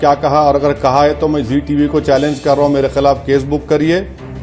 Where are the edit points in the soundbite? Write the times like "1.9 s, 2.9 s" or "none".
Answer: none